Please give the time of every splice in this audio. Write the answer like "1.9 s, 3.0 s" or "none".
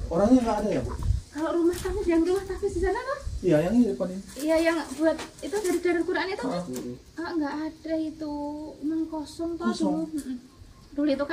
none

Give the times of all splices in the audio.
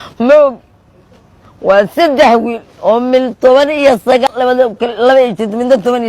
4.3 s

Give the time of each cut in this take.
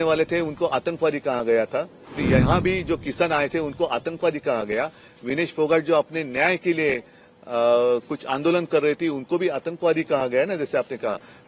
2.2 s

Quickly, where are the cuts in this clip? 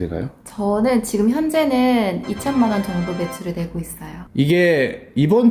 4.2 s

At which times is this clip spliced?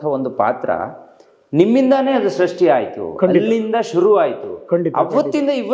none

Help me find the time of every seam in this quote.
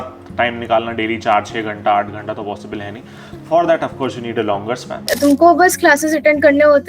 5.1 s

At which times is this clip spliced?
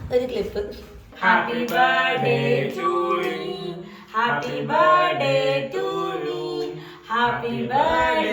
1.1 s

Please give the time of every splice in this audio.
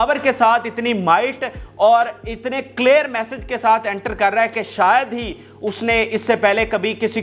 none

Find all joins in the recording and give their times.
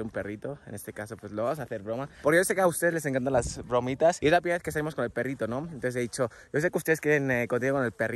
none

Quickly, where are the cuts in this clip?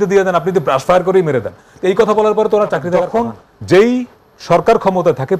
3.1 s

